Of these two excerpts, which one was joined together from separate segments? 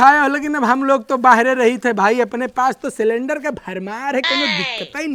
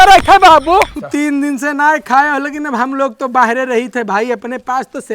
second; 1 cut; at 0.9 s

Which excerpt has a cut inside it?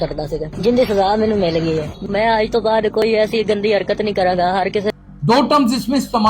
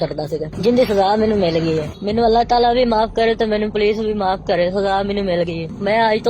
first; 2 cuts; at 2.0 s, 4.9 s

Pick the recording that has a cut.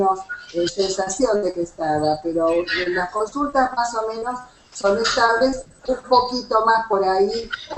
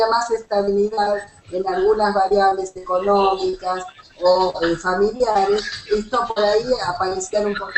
second; 1 cut; at 3.1 s

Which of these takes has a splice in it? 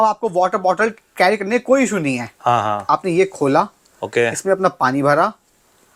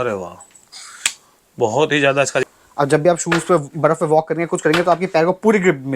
second; 1 cut; at 2.4 s

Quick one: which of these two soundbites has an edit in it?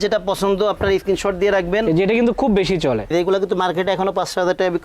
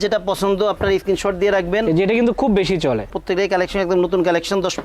first; 1 cut; at 3.1 s

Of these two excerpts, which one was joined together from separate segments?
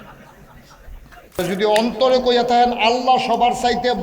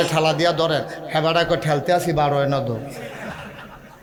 first; 1 cut; at 1.4 s

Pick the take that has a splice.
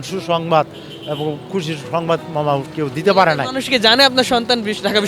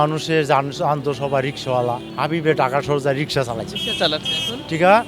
second; 1 cut; at 2.1 s

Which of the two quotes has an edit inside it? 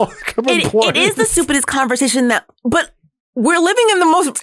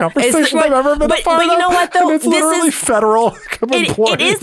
first; 1 cut; at 2.5 s

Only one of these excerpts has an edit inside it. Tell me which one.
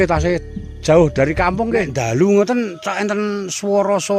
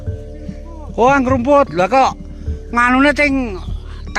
first; 1 cut; at 1.9 s

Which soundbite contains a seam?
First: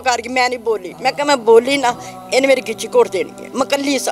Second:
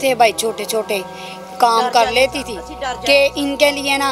first; 1 cut; at 0.9 s

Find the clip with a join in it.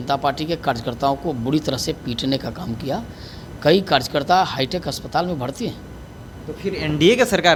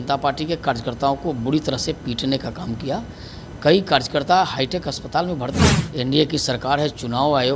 second; 1 cut; at 5.8 s

